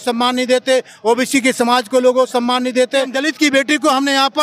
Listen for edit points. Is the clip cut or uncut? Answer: cut